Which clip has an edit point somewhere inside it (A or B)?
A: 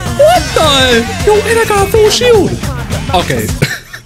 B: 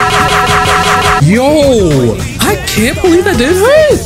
B